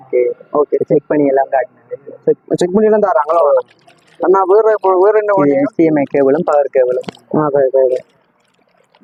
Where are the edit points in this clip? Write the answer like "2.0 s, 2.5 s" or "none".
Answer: none